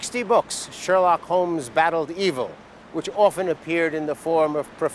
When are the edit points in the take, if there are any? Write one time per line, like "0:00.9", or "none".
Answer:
0:03.6